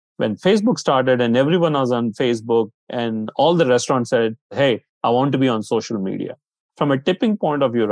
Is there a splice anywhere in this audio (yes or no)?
yes